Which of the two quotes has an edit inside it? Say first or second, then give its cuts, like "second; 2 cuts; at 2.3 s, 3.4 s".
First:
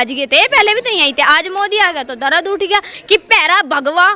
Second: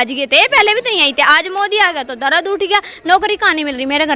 first; 1 cut; at 3.0 s